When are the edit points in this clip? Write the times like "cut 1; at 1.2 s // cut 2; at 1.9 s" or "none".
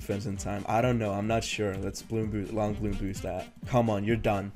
cut 1; at 3.5 s